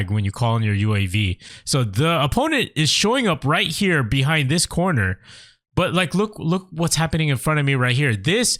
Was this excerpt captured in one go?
yes; 0 cuts

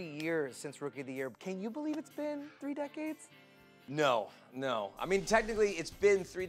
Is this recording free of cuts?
yes; 0 cuts

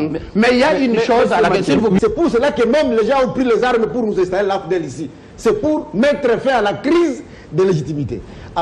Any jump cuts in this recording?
yes; 1 cut; at 2.0 s

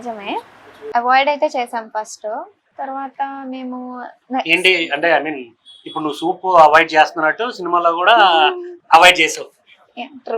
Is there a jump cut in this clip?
yes; 1 cut; at 8.7 s

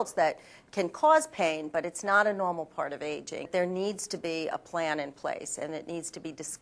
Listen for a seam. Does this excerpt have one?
yes; 1 cut; at 3.5 s

